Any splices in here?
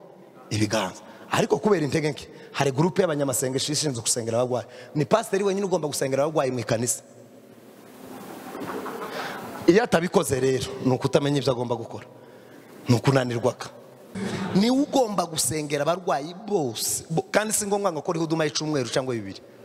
yes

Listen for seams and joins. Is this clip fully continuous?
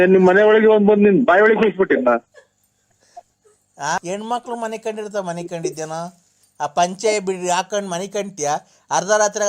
yes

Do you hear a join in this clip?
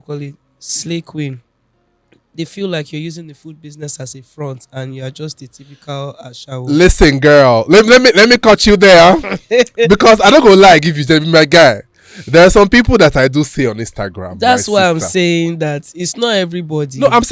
no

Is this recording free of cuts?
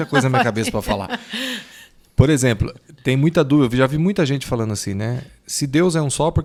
yes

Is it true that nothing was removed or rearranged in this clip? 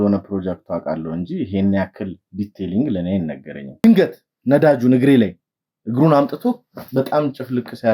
no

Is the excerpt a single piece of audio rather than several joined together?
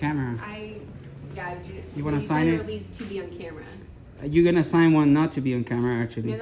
yes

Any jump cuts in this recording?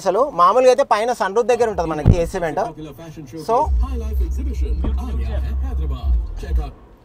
no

